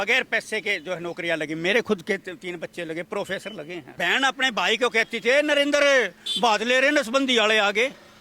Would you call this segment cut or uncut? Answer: cut